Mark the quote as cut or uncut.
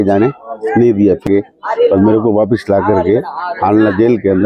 cut